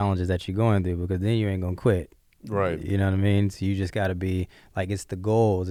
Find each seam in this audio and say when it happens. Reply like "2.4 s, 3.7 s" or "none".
none